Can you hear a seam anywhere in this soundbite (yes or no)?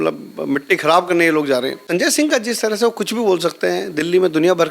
yes